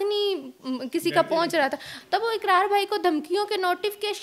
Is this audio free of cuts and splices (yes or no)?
no